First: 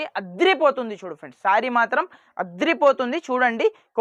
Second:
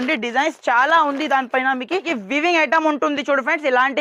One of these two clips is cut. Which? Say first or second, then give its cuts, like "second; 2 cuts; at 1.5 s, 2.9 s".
second; 1 cut; at 2.1 s